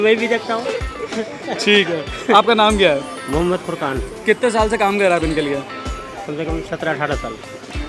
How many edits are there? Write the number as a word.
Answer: zero